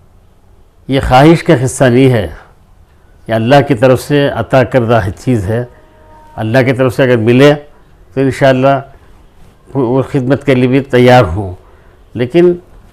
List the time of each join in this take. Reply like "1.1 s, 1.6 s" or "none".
none

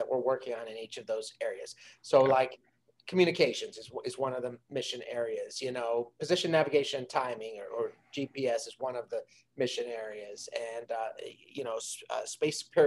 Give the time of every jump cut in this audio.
none

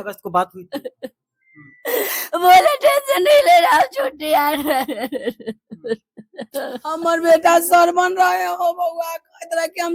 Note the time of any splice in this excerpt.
6.9 s

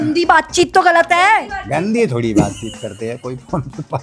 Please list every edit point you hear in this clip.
none

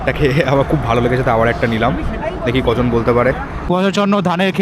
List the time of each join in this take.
3.5 s

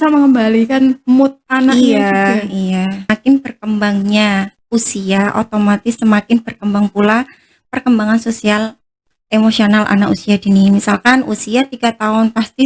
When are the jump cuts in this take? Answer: 3.1 s

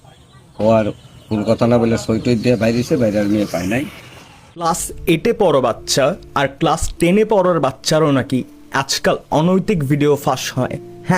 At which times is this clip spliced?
4.6 s

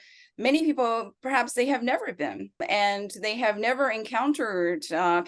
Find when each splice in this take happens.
2.6 s

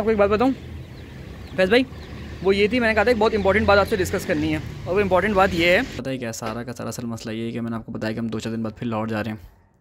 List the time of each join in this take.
6.0 s

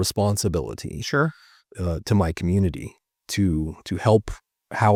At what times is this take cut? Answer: none

